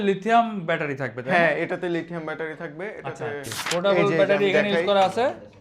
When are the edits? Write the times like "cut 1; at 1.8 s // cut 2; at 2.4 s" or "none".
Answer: cut 1; at 3.6 s